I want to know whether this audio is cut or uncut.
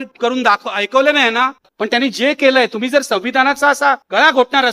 cut